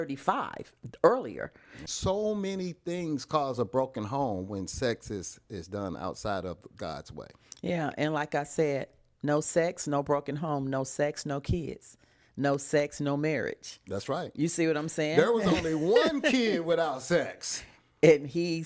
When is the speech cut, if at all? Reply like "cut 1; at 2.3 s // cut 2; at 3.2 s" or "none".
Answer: cut 1; at 1.9 s